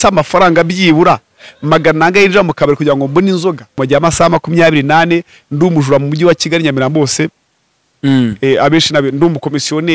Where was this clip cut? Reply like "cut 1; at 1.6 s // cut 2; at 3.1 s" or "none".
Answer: cut 1; at 3.8 s